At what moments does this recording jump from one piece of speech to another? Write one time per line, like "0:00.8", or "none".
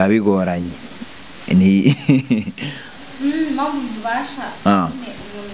none